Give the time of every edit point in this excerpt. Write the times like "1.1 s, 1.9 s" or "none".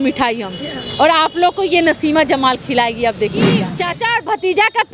3.7 s